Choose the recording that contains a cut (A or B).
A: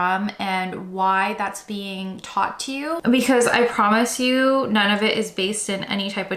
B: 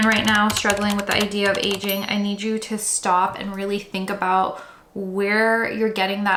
A